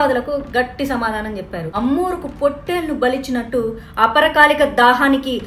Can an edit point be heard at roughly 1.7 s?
yes; 1 cut; at 1.7 s

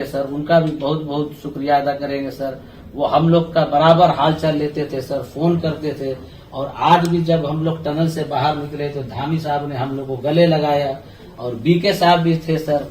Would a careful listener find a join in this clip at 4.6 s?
no; 0 cuts

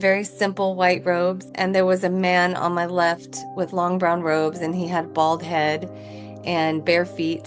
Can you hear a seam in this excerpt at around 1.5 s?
yes; 1 cut; at 1.5 s

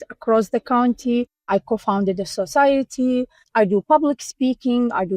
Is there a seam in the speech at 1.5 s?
yes; 2 cuts; at 1.5 s, 3.4 s

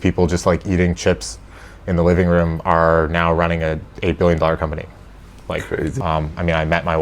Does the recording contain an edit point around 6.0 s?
yes; 1 cut; at 6.0 s

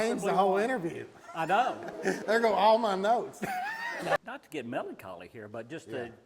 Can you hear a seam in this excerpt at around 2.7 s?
no; 1 cut; at 4.2 s

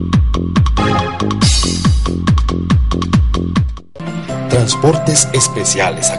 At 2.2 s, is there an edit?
no; 1 cut; at 3.8 s

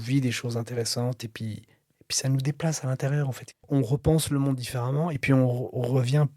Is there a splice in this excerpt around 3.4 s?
yes; 1 cut; at 3.4 s

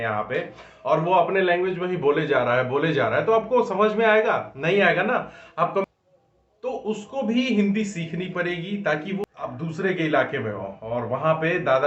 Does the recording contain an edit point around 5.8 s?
yes; 2 cuts; at 5.8 s, 9.2 s

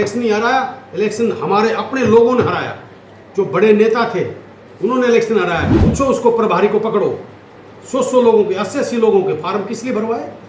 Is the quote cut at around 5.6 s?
yes; 1 cut; at 5.6 s

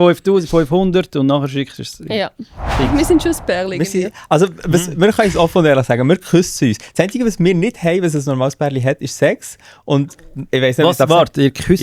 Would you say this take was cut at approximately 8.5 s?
no; 1 cut; at 2.6 s

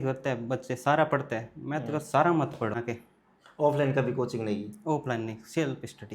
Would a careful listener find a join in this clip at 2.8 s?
yes; 1 cut; at 2.8 s

